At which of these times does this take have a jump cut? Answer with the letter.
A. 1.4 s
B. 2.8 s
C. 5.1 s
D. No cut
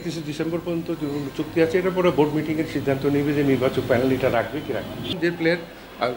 C